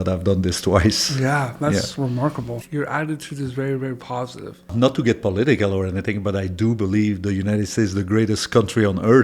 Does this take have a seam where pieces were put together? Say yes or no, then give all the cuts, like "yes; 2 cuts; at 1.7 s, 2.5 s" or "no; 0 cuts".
yes; 2 cuts; at 2.6 s, 4.7 s